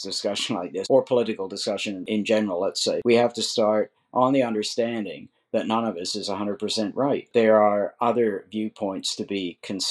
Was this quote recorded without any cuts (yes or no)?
no